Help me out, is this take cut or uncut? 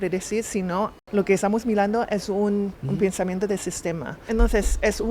cut